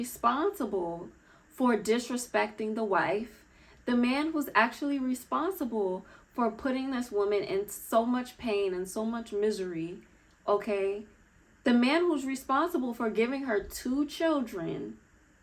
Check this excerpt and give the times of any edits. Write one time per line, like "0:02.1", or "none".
none